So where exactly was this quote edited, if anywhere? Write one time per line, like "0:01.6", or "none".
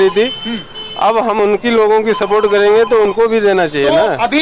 none